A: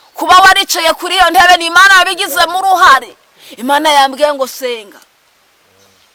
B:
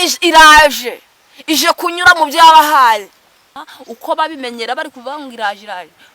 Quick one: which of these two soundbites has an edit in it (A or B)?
B